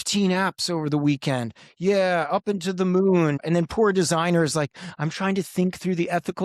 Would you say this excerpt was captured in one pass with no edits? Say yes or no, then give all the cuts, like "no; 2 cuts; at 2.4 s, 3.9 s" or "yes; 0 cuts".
no; 1 cut; at 3.4 s